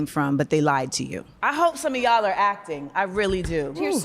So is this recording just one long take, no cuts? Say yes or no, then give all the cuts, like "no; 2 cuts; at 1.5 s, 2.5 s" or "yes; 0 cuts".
yes; 0 cuts